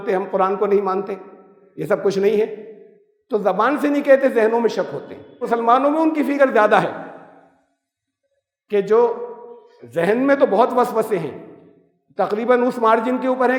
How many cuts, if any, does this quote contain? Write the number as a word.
one